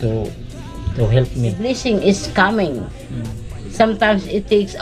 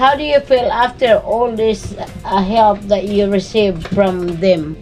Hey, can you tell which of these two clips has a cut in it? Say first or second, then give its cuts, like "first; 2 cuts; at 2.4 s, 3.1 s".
first; 1 cut; at 1.6 s